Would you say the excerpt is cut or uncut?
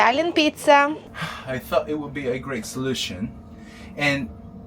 cut